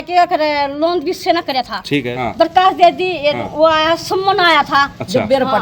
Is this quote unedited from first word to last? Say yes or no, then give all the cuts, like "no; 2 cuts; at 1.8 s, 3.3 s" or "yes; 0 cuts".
no; 1 cut; at 2.1 s